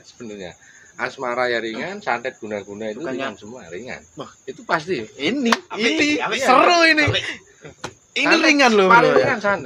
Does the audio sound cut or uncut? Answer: uncut